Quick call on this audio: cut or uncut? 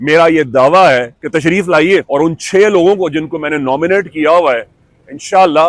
cut